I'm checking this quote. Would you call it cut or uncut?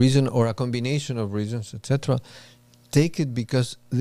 uncut